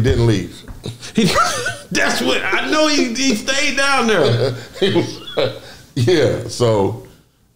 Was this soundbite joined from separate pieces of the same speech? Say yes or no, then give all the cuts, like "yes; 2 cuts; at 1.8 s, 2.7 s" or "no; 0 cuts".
no; 0 cuts